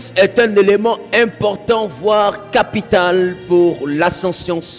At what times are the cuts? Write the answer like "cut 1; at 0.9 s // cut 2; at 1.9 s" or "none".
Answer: none